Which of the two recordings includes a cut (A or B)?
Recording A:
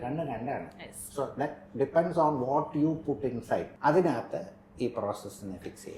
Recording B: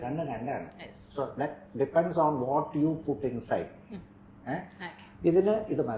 A